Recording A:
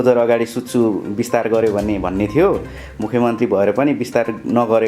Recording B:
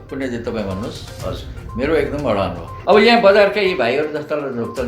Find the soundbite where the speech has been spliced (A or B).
B